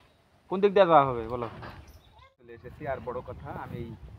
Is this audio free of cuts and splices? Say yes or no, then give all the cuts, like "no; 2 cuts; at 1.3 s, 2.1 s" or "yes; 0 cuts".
no; 1 cut; at 2.5 s